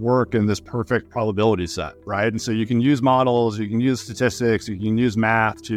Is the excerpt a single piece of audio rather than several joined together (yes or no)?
yes